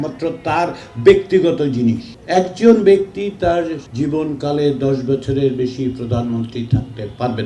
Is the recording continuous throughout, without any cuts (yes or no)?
no